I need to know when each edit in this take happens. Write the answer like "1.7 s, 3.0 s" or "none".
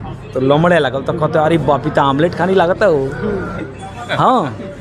none